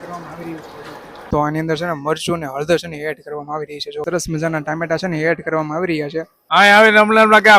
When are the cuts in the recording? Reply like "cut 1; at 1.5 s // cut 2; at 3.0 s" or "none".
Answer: cut 1; at 1.3 s // cut 2; at 4.0 s // cut 3; at 6.4 s